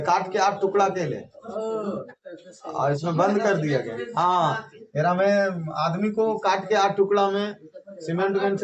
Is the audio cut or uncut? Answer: uncut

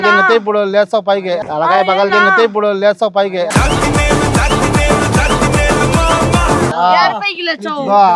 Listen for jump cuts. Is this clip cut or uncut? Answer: uncut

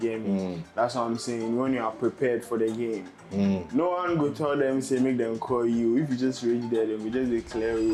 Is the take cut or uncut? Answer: uncut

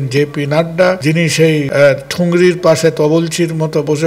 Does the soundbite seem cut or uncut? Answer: cut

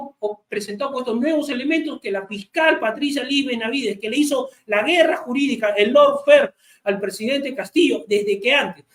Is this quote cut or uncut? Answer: uncut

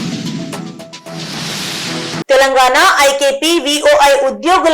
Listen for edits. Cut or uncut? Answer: cut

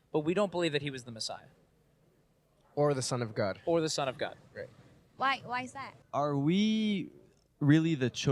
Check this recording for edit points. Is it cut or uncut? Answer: cut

